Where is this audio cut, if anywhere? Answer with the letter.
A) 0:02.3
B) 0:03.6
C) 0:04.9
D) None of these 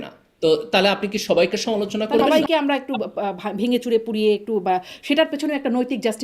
A